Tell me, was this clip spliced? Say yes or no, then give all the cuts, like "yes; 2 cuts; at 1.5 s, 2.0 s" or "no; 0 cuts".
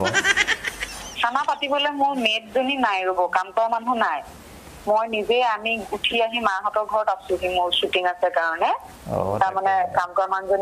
no; 0 cuts